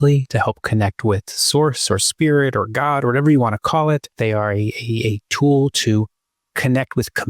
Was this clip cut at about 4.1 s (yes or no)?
yes